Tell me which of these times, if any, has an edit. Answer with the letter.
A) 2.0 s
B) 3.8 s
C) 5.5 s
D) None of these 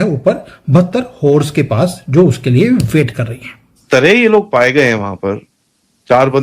B